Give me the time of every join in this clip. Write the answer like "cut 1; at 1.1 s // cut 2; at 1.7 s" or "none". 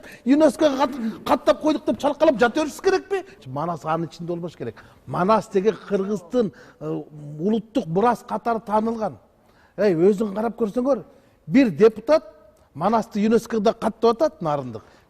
cut 1; at 3.3 s